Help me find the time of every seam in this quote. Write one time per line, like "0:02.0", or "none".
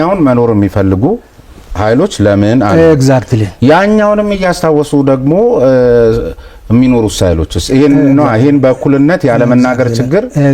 none